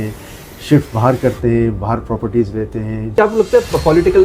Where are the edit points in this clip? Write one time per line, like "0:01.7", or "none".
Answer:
0:03.1